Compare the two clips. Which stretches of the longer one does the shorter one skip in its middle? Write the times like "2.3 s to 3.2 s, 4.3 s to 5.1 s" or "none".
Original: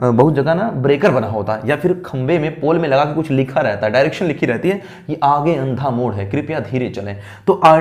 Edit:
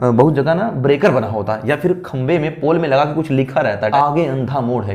3.9 s to 5.2 s